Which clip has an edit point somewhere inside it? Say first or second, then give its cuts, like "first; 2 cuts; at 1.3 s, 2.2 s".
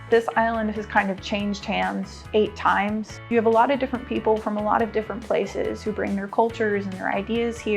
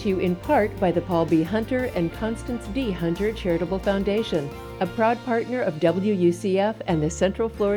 first; 2 cuts; at 2.2 s, 3.2 s